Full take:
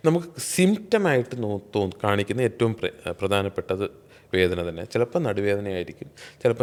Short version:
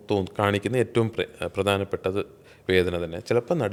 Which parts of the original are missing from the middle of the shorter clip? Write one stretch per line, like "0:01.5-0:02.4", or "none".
none